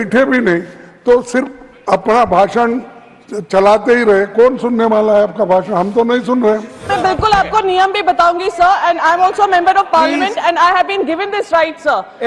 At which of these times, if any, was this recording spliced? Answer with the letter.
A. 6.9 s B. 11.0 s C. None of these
A